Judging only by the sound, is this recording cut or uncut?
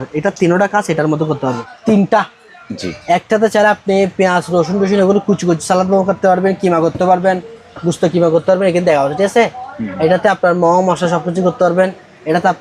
cut